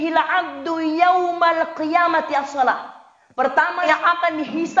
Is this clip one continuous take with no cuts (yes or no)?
no